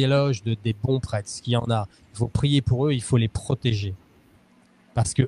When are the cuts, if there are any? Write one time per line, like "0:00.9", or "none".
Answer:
none